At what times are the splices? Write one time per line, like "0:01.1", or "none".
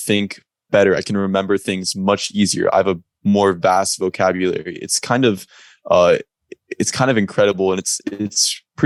none

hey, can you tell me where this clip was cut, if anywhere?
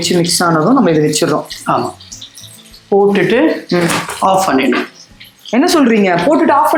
none

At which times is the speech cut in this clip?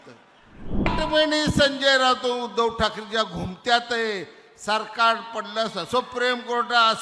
0:00.9

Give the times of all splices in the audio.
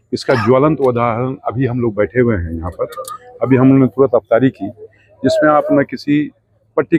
none

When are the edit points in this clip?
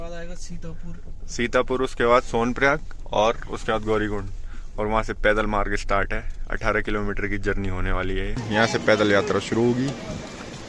0:08.4

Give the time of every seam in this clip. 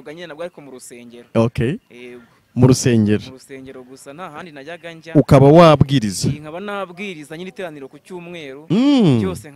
none

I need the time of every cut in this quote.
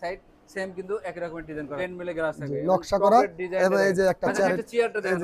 0:01.7

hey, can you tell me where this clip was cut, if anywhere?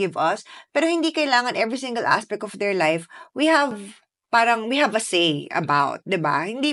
none

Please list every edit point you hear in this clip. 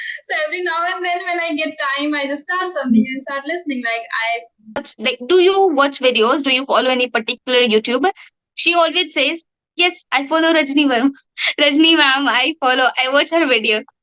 0:04.9

